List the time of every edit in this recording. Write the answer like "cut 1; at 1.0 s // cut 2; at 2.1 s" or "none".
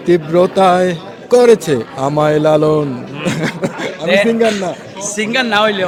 none